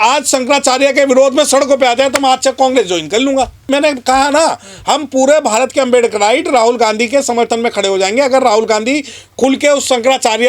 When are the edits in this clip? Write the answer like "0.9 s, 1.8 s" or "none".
3.6 s